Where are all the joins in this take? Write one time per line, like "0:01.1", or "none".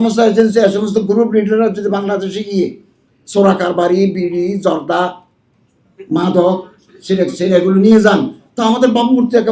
none